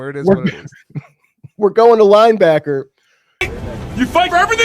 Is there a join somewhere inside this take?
yes; 1 cut; at 3.5 s

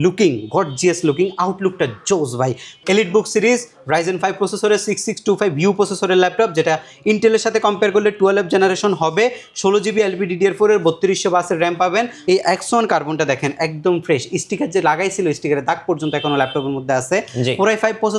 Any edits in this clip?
yes; 2 cuts; at 2.7 s, 12.1 s

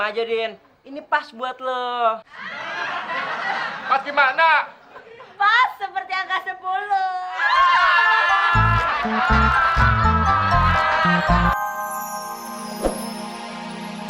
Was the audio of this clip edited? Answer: yes; 1 cut; at 11.5 s

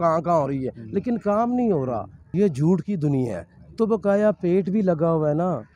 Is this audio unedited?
no; 1 cut; at 2.2 s

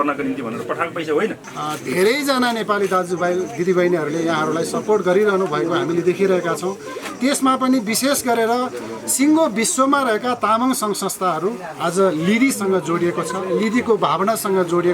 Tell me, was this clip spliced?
yes; 1 cut; at 1.5 s

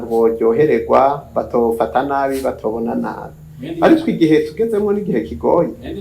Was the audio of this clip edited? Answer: no; 0 cuts

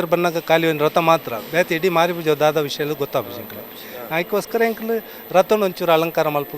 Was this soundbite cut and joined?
no; 0 cuts

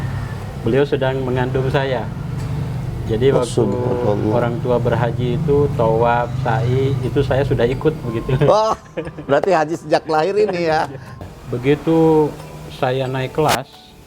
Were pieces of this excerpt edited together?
yes; 1 cut; at 11.2 s

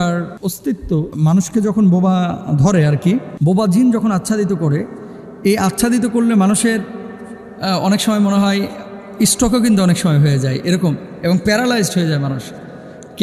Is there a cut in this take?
no; 0 cuts

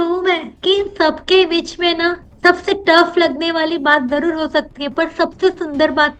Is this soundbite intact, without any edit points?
yes; 0 cuts

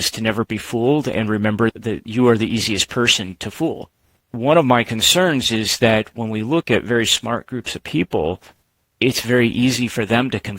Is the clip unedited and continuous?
no; 2 cuts; at 1.7 s, 4.3 s

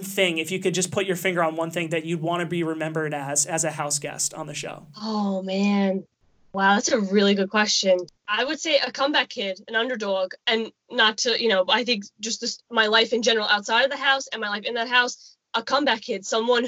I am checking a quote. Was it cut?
no; 0 cuts

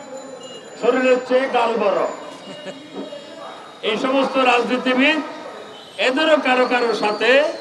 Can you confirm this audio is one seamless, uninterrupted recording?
yes; 0 cuts

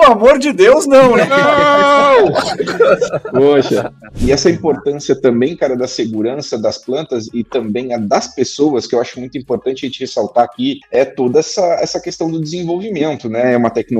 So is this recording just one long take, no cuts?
no; 2 cuts; at 4.0 s, 10.8 s

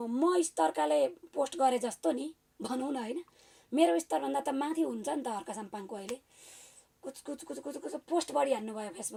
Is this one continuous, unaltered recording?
yes; 0 cuts

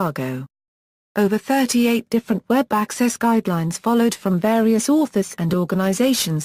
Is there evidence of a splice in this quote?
yes; 1 cut; at 4.4 s

